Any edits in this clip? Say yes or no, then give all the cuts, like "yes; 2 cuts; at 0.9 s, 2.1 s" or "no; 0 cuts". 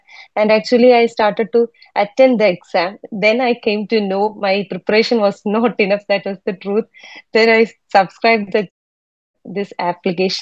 no; 0 cuts